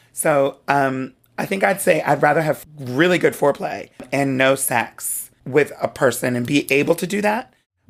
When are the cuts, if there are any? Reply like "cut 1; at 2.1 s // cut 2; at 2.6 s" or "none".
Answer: cut 1; at 2.6 s // cut 2; at 4.1 s // cut 3; at 5.3 s